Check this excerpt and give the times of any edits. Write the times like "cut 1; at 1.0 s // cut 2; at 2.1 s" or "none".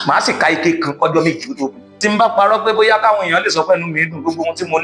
cut 1; at 1.9 s

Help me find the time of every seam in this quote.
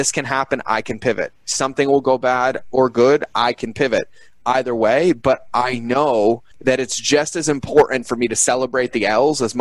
cut 1; at 6.5 s

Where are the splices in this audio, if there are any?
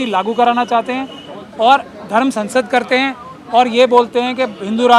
none

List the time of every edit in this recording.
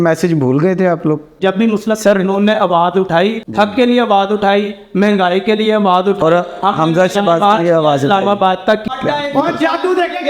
cut 1; at 1.4 s // cut 2; at 3.4 s // cut 3; at 8.9 s

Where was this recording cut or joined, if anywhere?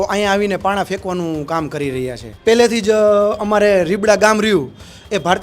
cut 1; at 2.3 s

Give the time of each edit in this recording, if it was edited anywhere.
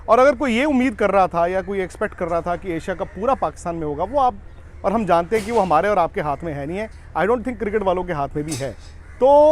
none

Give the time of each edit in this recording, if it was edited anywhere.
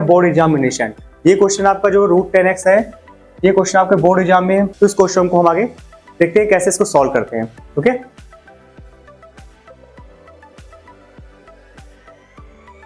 cut 1; at 4.7 s

